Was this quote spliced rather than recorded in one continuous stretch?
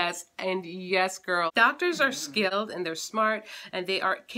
yes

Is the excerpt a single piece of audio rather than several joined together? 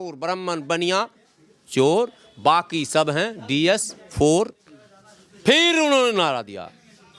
yes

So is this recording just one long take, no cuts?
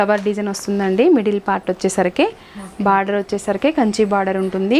yes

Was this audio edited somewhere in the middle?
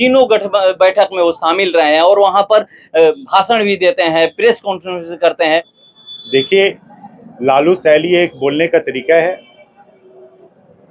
yes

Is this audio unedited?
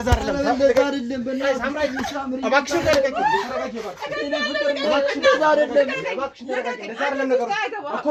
yes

